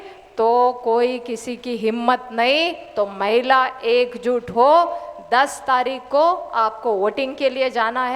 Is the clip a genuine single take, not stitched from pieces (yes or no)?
yes